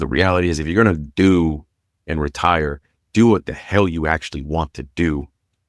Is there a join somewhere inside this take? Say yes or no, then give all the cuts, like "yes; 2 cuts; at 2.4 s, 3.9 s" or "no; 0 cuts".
no; 0 cuts